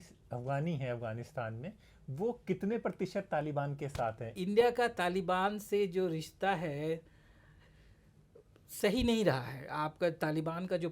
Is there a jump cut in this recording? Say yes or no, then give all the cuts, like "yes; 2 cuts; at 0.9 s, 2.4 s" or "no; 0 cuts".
yes; 1 cut; at 4.3 s